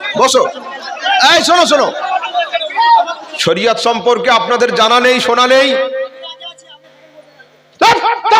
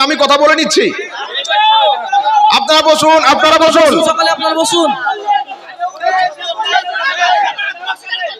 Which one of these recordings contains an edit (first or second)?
first